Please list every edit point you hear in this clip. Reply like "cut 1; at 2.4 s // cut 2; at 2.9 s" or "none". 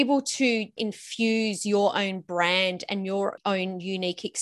none